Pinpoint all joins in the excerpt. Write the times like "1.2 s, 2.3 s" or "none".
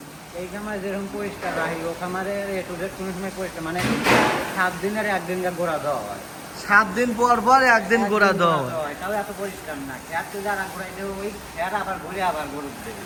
none

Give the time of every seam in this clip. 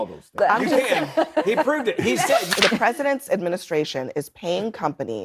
2.5 s

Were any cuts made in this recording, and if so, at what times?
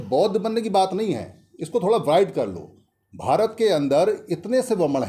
none

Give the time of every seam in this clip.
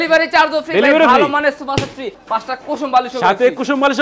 2.2 s

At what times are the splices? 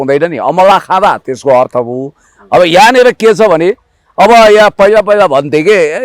none

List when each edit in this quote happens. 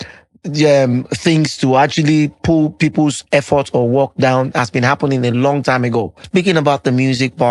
6.2 s

